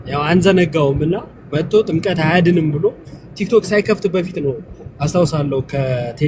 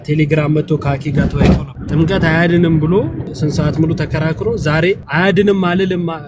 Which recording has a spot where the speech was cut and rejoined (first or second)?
second